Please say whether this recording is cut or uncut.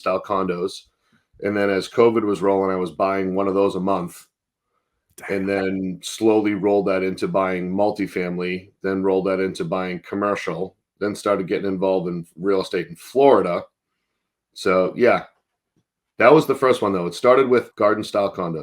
cut